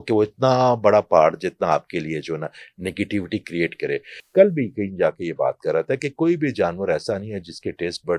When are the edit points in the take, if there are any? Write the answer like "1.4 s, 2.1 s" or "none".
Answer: 4.2 s